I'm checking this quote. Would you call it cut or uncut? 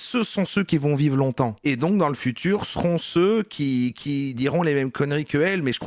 uncut